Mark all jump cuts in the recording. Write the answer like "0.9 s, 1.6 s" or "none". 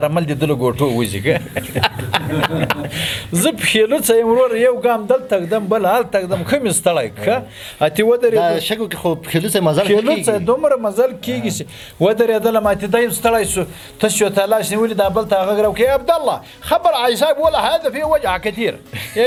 none